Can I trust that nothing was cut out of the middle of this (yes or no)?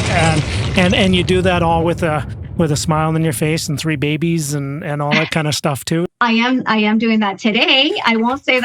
no